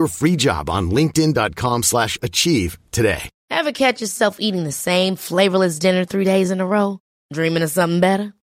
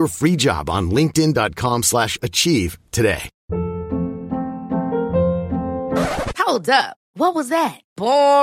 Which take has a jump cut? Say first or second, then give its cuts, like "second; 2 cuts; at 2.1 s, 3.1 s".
first; 1 cut; at 3.3 s